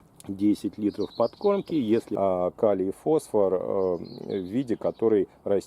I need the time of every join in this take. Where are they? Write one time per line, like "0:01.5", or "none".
0:02.1